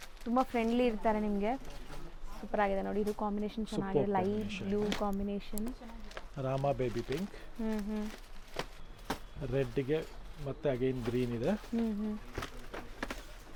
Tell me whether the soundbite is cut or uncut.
uncut